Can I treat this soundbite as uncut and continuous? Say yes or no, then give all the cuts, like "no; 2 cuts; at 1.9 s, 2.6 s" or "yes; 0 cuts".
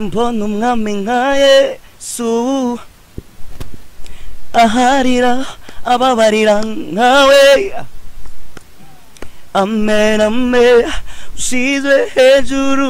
yes; 0 cuts